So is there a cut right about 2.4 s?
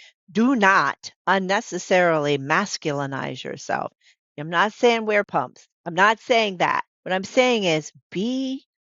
no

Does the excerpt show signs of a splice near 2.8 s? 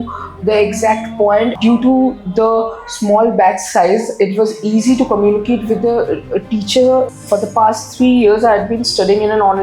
no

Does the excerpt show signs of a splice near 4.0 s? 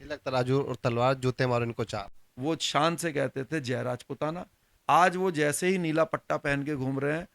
no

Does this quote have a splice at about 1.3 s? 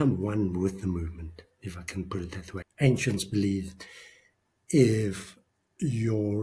no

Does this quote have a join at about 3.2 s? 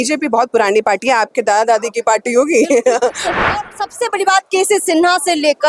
yes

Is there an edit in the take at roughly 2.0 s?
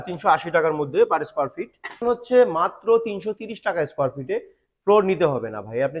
yes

